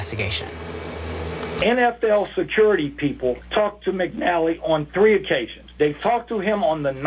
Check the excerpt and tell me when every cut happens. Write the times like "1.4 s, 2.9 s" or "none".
4.8 s

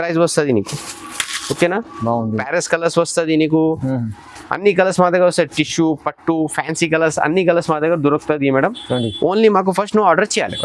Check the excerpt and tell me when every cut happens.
2.4 s

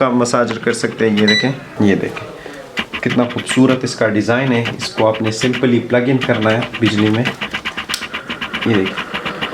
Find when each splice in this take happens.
1.8 s

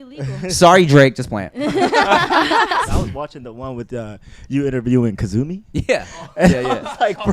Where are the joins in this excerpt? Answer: 2.9 s

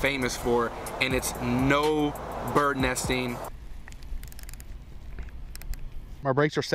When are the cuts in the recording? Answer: 3.4 s

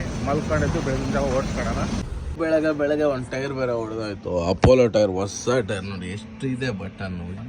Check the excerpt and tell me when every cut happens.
2.0 s

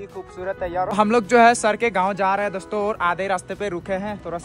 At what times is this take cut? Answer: 0.9 s

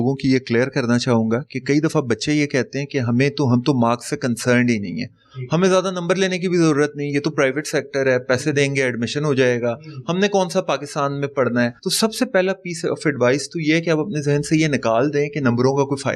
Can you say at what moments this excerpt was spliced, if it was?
none

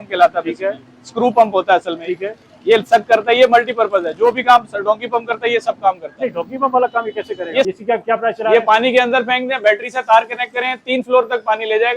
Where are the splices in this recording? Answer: 7.7 s

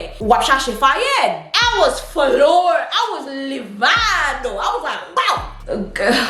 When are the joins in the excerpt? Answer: 1.5 s

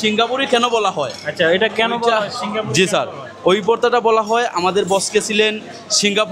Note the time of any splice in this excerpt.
none

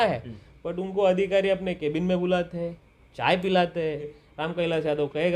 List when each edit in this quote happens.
4.2 s

